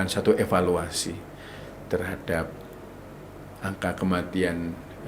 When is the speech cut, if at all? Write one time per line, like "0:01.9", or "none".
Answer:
none